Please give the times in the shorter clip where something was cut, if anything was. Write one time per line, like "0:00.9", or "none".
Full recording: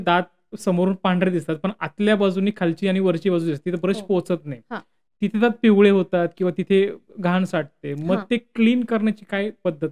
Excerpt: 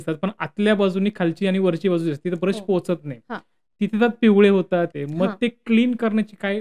0:04.9